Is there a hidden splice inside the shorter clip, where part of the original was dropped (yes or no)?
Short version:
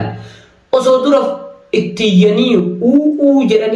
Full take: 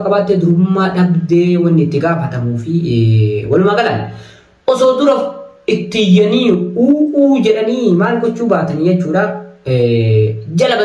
no